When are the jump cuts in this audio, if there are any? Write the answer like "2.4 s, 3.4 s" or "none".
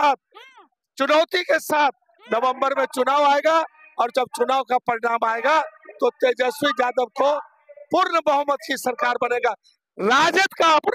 none